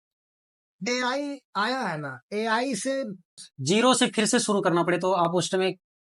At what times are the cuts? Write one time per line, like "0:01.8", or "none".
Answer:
0:03.5